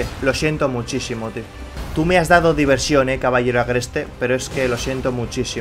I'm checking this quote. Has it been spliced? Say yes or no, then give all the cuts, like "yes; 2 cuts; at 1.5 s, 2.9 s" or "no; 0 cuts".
yes; 1 cut; at 1.7 s